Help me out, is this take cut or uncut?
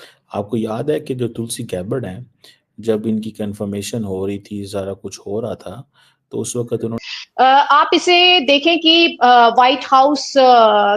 cut